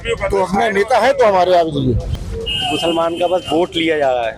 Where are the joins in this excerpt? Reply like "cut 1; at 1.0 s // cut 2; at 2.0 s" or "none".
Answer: cut 1; at 2.1 s